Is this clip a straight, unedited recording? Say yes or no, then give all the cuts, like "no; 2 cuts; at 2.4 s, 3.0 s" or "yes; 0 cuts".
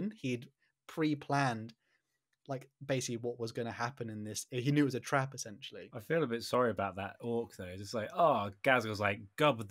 no; 1 cut; at 5.9 s